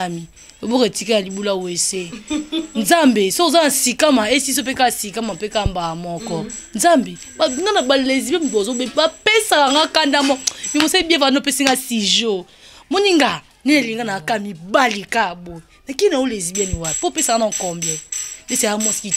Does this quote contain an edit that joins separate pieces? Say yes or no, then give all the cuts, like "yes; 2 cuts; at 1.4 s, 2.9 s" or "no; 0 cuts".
no; 0 cuts